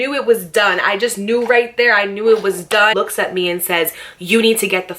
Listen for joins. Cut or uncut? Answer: cut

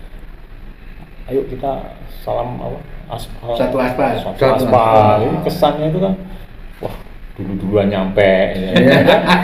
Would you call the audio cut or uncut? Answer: uncut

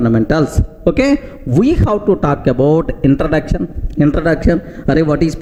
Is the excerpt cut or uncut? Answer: uncut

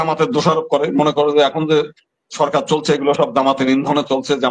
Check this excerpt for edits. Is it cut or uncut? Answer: uncut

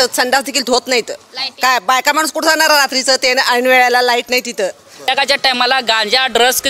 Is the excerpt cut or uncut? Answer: cut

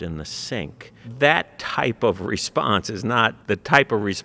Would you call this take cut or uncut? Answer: cut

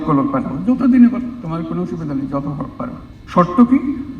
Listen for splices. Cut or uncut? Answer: cut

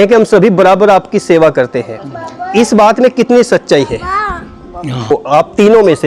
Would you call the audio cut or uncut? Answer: cut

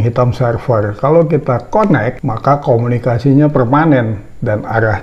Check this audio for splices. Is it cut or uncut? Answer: uncut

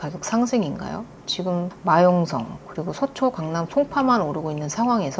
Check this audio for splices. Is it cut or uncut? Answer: uncut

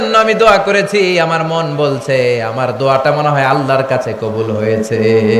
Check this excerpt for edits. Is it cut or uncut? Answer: uncut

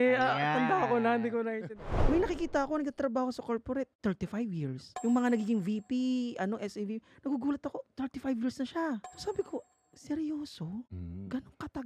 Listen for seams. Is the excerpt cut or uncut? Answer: cut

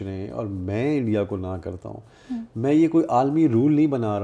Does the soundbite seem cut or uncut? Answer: uncut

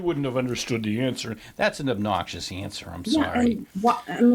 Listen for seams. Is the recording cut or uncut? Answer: uncut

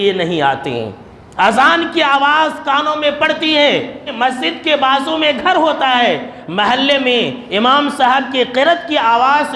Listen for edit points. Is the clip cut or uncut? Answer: cut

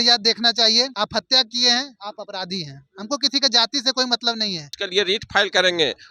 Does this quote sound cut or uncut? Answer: cut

